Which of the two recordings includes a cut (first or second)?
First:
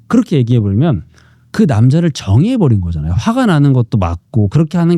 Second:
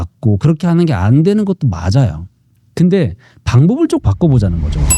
second